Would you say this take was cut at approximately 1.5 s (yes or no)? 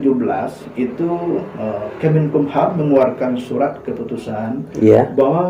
no